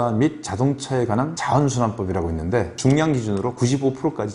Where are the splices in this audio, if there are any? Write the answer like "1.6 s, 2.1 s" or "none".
1.4 s, 2.7 s